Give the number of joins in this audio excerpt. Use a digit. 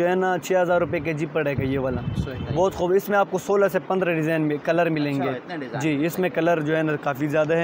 0